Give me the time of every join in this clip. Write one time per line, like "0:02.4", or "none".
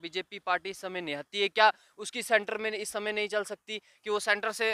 none